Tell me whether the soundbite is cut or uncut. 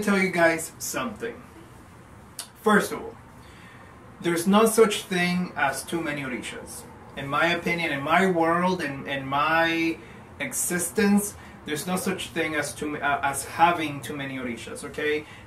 uncut